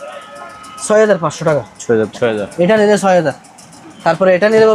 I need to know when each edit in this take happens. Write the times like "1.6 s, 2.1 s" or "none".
2.1 s